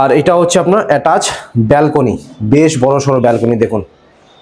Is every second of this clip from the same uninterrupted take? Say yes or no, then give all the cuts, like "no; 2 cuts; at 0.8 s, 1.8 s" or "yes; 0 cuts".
yes; 0 cuts